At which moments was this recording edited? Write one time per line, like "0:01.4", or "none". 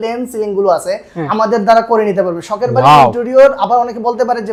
none